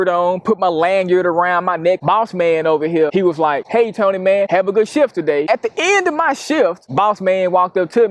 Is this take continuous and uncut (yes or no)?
no